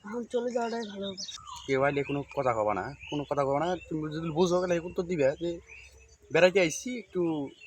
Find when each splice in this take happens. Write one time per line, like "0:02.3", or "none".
0:01.4